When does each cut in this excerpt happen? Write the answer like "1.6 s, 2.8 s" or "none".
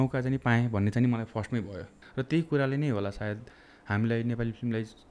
1.9 s